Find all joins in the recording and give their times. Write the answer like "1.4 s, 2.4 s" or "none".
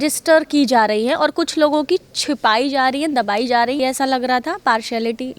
3.8 s